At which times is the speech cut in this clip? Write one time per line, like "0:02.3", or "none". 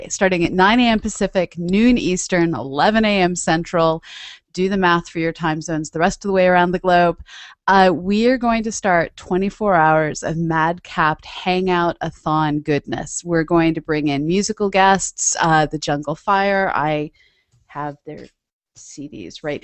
0:16.4